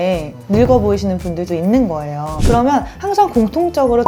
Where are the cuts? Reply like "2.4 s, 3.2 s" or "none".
1.5 s, 2.4 s

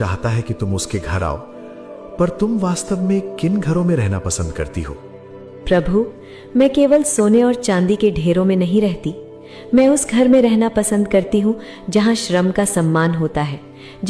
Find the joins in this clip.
none

